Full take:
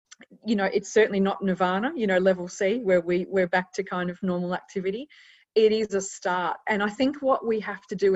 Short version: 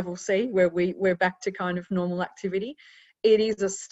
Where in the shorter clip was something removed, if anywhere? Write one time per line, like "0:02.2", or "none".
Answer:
none